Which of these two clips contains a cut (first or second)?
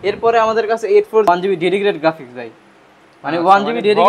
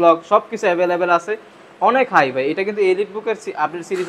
first